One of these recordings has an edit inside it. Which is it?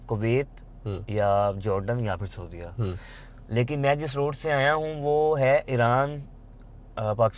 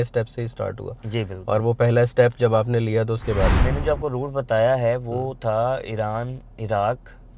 second; 1 cut; at 3.6 s

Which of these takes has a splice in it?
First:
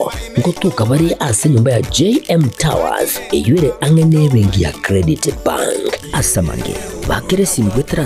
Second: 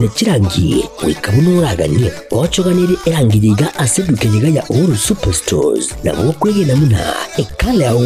first; 1 cut; at 4.8 s

